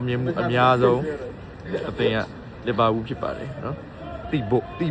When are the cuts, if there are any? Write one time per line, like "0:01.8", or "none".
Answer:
none